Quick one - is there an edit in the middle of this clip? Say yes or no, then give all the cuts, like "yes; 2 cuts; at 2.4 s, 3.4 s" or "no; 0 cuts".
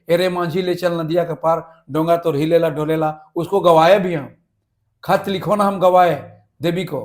no; 0 cuts